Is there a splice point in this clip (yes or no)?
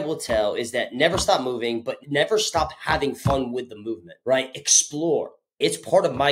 yes